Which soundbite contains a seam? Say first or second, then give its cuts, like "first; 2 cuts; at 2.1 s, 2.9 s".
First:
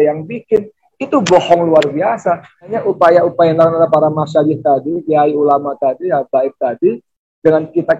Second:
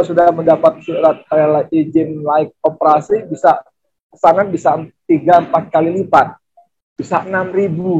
first; 1 cut; at 2.8 s